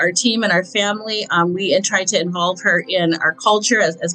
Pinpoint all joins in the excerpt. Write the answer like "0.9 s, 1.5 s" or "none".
none